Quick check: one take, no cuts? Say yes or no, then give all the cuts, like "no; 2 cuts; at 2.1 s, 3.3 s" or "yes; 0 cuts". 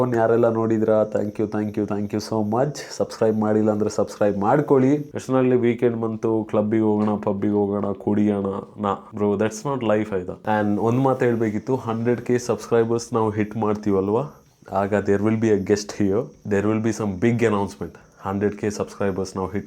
no; 2 cuts; at 5.1 s, 10.3 s